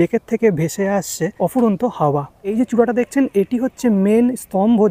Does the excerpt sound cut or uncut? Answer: cut